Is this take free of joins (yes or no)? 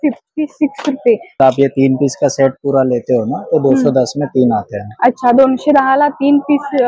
no